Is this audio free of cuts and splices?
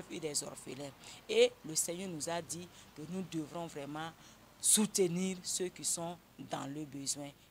yes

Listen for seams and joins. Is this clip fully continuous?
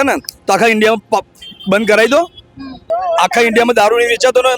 no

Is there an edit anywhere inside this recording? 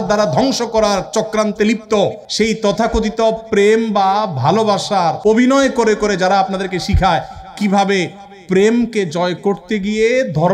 yes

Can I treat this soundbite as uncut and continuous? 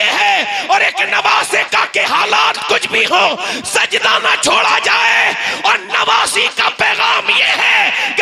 yes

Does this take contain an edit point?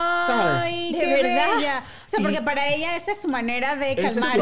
no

